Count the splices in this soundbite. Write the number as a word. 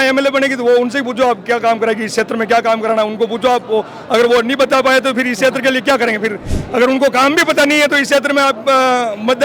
zero